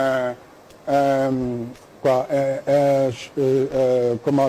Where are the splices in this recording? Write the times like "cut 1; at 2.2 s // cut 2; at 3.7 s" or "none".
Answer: none